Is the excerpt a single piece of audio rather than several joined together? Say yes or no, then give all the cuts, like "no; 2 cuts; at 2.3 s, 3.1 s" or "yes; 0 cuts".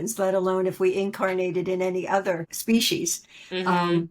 no; 1 cut; at 2.5 s